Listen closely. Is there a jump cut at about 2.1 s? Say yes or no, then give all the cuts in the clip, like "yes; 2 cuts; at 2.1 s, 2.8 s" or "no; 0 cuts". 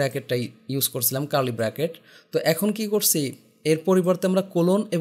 no; 0 cuts